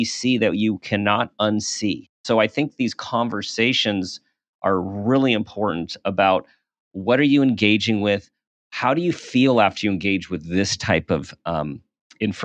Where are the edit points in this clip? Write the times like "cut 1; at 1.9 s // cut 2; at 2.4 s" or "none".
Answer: cut 1; at 2.2 s